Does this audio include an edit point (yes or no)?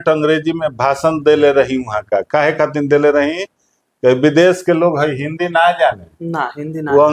no